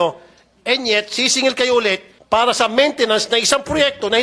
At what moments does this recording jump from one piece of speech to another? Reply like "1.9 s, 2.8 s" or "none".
2.1 s

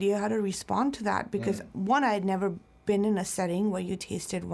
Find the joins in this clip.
none

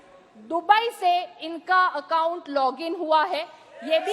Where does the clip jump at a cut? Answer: none

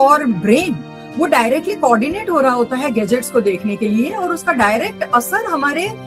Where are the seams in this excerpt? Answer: none

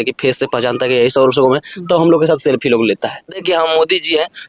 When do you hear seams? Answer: 3.4 s

